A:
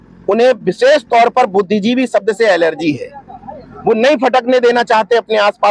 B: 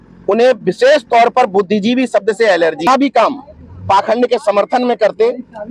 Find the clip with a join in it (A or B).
B